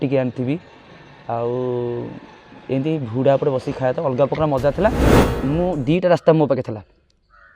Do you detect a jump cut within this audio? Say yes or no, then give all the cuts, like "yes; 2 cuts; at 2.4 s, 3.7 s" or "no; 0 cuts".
yes; 1 cut; at 5.3 s